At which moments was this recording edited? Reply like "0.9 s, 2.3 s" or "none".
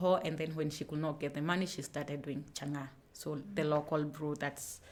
none